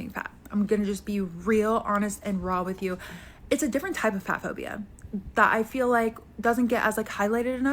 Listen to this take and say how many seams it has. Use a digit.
1